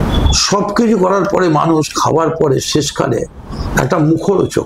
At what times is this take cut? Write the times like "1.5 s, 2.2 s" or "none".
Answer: none